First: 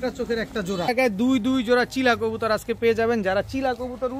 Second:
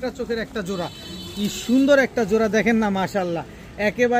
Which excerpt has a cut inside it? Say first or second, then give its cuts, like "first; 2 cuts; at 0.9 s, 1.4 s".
first; 1 cut; at 0.9 s